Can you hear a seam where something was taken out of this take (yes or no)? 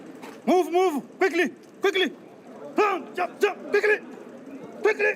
no